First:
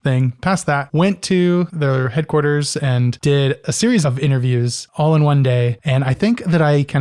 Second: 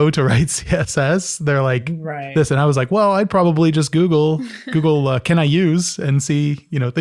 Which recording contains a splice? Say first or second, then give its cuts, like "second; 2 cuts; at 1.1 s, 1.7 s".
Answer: first; 5 cuts; at 0.9 s, 1.7 s, 3.1 s, 4.8 s, 5.8 s